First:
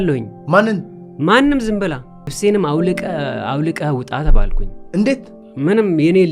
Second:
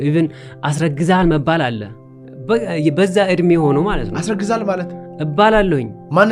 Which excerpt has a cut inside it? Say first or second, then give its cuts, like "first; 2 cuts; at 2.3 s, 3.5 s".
first; 1 cut; at 2.3 s